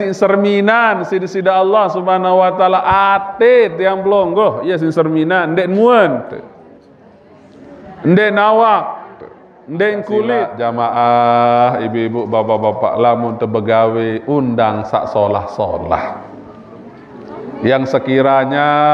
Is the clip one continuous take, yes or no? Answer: no